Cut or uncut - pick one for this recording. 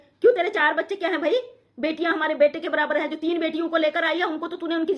uncut